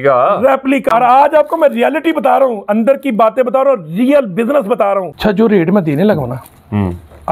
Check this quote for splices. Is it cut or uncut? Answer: cut